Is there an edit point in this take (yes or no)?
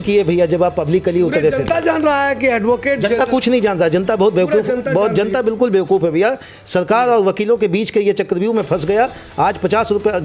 no